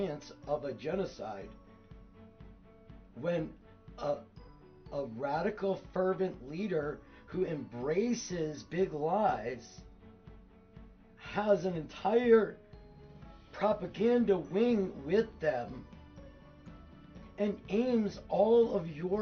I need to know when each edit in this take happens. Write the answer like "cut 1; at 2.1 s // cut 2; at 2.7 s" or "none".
none